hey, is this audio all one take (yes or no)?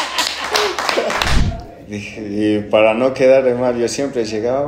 no